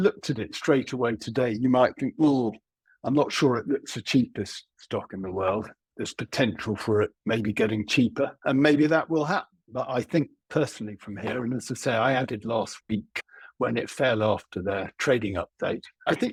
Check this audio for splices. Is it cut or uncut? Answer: uncut